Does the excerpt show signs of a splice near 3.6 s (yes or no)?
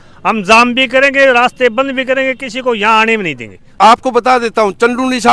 yes